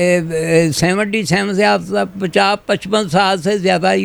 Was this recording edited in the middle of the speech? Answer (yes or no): no